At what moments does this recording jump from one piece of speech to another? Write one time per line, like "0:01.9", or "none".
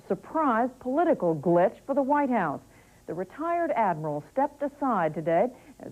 0:04.8